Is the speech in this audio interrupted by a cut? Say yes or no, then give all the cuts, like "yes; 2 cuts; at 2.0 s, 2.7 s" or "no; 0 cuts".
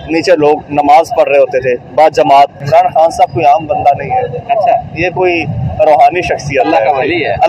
yes; 1 cut; at 2.6 s